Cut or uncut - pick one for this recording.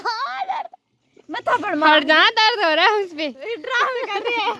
uncut